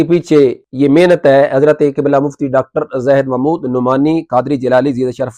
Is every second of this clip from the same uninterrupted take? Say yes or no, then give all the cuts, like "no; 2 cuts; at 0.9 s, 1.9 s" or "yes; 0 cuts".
yes; 0 cuts